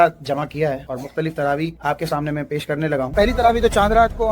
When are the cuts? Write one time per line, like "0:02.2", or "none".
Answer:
0:03.1